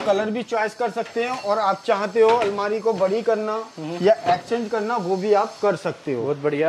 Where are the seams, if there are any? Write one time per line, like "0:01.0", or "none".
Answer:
none